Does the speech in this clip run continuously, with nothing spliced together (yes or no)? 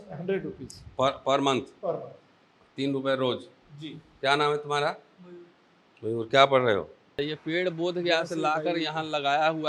no